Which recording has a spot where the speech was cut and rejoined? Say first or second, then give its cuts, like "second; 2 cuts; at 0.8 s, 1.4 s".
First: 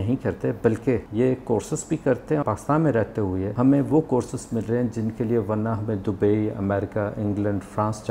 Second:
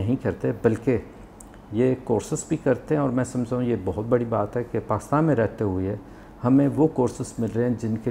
first; 3 cuts; at 1.1 s, 2.4 s, 3.5 s